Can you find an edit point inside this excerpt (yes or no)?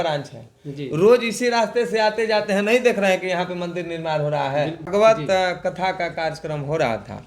yes